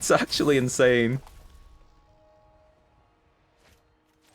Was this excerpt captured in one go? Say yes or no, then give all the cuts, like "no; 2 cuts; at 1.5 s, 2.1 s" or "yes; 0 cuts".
no; 1 cut; at 1.2 s